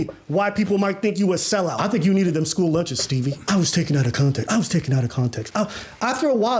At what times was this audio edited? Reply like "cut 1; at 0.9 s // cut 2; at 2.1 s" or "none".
cut 1; at 1.8 s